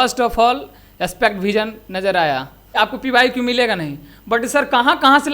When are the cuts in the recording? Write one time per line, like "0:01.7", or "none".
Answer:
0:02.7